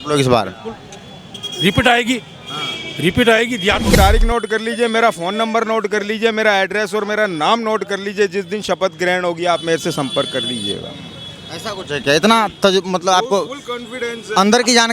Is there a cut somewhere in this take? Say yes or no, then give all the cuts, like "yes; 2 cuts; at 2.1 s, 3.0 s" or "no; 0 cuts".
yes; 1 cut; at 4.0 s